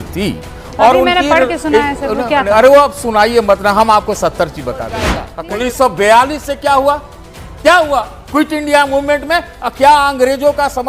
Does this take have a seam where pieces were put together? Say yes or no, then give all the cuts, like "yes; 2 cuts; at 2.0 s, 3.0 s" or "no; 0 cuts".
yes; 1 cut; at 5.2 s